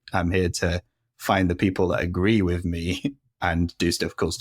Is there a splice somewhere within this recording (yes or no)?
yes